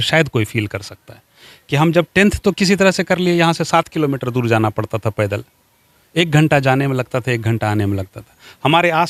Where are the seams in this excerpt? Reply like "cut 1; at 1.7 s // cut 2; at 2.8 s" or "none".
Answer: none